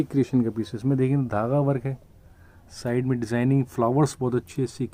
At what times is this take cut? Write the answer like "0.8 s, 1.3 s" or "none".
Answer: none